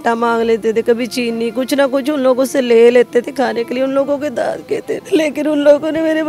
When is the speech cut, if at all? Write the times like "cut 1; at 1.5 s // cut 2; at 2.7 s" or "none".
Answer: cut 1; at 5.0 s